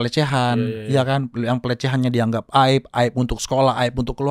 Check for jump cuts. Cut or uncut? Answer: uncut